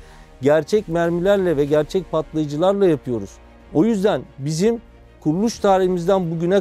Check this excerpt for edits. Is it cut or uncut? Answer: uncut